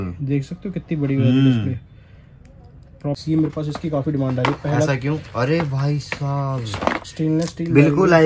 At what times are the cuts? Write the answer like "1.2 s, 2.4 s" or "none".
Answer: 3.2 s